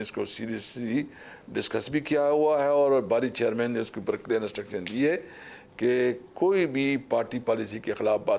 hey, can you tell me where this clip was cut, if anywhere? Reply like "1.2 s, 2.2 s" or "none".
none